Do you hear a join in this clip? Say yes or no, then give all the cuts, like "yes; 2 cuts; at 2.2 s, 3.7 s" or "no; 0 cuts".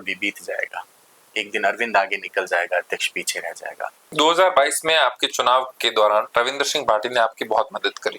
yes; 2 cuts; at 4.0 s, 6.3 s